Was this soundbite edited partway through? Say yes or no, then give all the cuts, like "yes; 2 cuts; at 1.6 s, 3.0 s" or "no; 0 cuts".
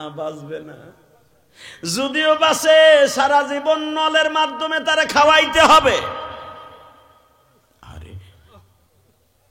no; 0 cuts